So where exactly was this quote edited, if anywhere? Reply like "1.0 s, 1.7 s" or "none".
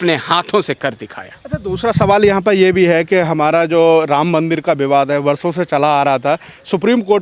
none